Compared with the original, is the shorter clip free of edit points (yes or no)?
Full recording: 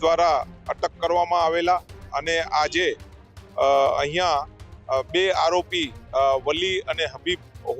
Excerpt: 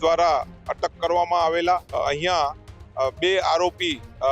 no